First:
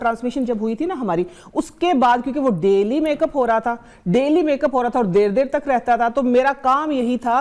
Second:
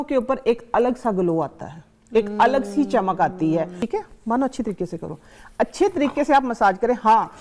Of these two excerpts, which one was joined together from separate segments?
second; 1 cut; at 3.8 s

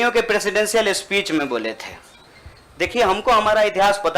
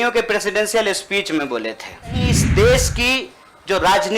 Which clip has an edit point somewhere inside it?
second; 1 cut; at 2.4 s

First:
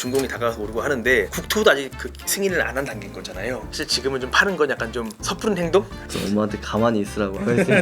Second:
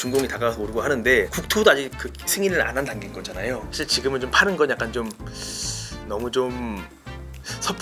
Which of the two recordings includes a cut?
first; 2 cuts; at 5.2 s, 6.0 s

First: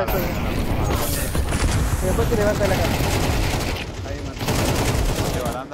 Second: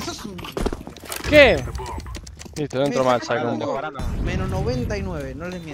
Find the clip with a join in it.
second; 1 cut; at 4.0 s

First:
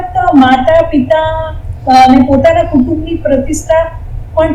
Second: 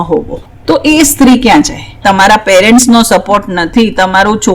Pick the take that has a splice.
second; 1 cut; at 2.0 s

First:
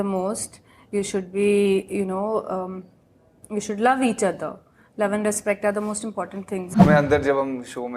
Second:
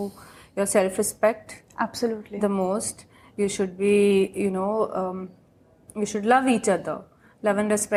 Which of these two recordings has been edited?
first; 1 cut; at 6.7 s

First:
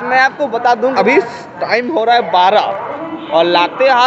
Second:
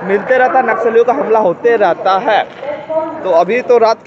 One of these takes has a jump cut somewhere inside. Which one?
first; 1 cut; at 0.9 s

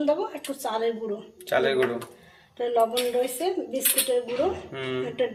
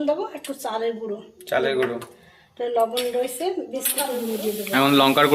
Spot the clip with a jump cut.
second; 1 cut; at 4.2 s

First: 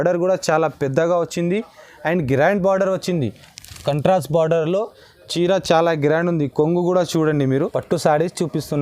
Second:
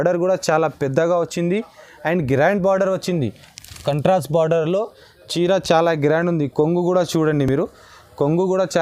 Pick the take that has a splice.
first; 1 cut; at 7.5 s

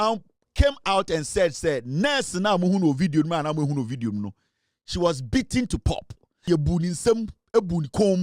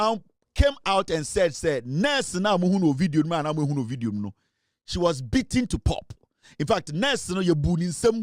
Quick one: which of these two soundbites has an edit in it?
first; 1 cut; at 6.5 s

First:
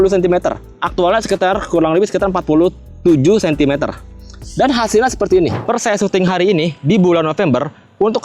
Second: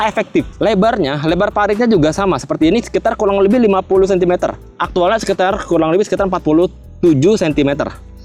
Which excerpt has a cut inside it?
first; 1 cut; at 5.6 s

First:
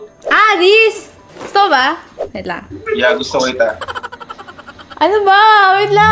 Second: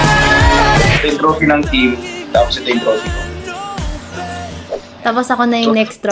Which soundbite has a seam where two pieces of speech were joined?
second; 1 cut; at 1.0 s

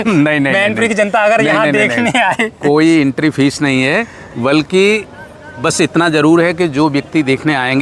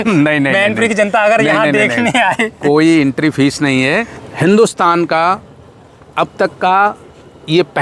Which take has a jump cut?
second; 1 cut; at 4.2 s

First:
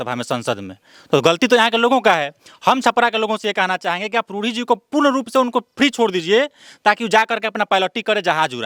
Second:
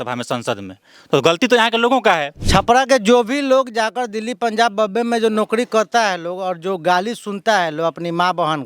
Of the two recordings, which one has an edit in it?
second; 1 cut; at 2.3 s

